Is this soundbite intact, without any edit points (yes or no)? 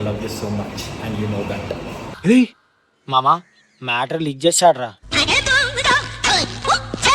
yes